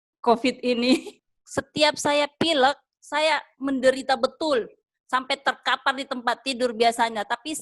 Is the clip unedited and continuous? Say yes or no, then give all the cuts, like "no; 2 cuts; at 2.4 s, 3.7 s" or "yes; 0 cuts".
no; 1 cut; at 1.2 s